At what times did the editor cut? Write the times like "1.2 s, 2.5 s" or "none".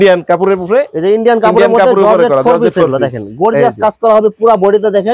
none